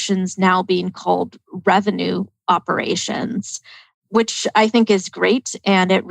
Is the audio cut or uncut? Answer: cut